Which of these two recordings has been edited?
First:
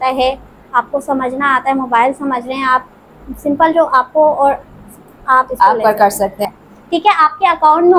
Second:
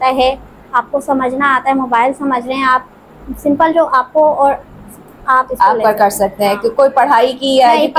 first; 1 cut; at 6.4 s

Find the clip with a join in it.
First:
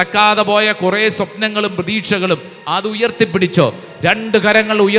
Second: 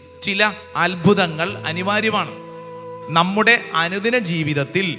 second; 1 cut; at 2.9 s

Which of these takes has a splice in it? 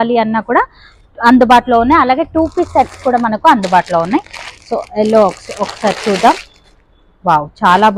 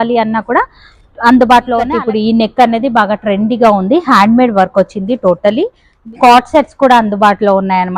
second; 2 cuts; at 2.0 s, 5.9 s

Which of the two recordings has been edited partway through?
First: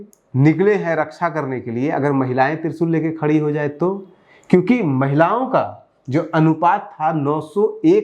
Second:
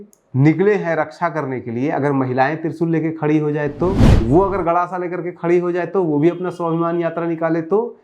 second; 1 cut; at 4.1 s

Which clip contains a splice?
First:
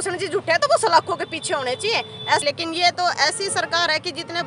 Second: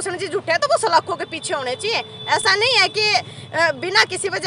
first; 1 cut; at 2.4 s

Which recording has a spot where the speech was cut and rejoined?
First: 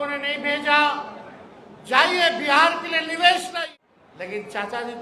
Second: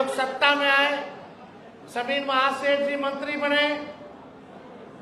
first; 1 cut; at 3.5 s

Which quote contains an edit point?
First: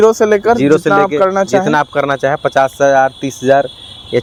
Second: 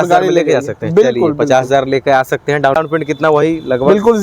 second; 1 cut; at 2.8 s

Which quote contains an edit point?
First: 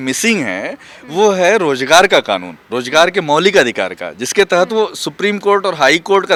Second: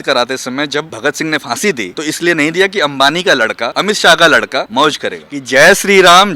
second; 4 cuts; at 0.9 s, 1.9 s, 3.7 s, 4.9 s

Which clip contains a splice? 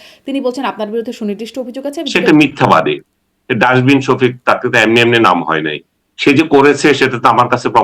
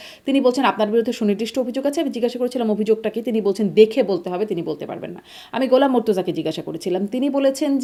first; 1 cut; at 2.0 s

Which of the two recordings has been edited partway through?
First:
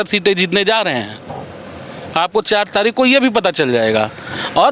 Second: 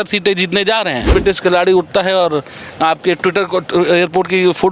second; 1 cut; at 1.1 s

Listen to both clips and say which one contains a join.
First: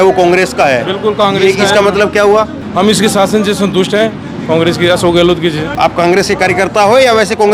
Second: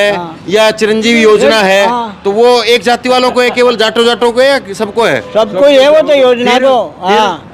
first; 2 cuts; at 2.6 s, 5.8 s

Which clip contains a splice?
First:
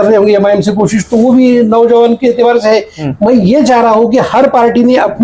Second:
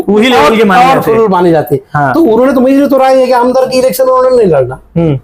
first; 1 cut; at 3.0 s

